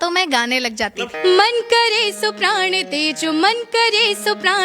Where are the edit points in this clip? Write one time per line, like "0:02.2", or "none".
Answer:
0:01.0